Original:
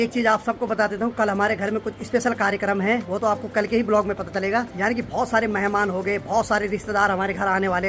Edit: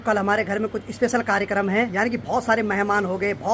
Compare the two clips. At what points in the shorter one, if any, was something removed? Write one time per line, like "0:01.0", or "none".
0:01.9